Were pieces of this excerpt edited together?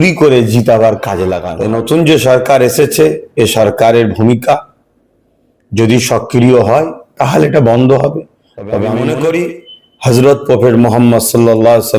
yes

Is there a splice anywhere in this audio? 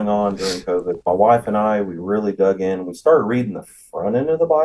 yes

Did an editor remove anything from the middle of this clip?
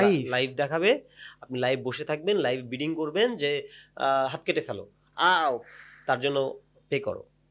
no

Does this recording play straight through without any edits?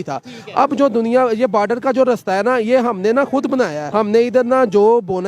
no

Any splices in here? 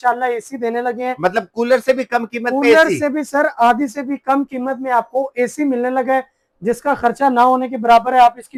no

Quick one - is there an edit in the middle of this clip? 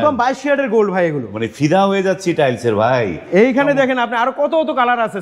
no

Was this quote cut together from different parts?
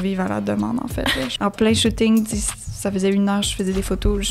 yes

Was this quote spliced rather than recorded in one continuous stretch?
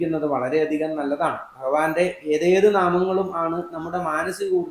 no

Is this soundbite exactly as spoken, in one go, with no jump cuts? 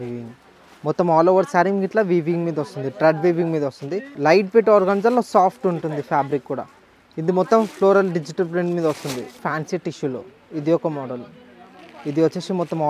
no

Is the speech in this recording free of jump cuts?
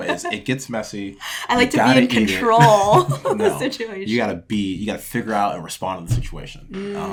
yes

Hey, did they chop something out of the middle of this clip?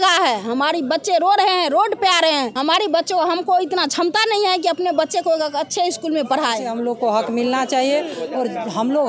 yes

